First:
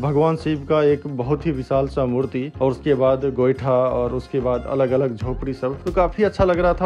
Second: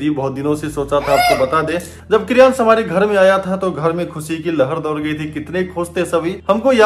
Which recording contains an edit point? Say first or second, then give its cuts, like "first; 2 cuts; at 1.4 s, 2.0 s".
second; 1 cut; at 1.9 s